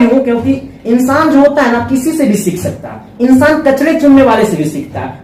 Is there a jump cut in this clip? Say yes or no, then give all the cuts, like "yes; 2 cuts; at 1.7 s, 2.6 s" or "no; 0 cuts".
no; 0 cuts